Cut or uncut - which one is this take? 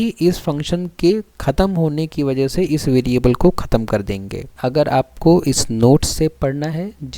cut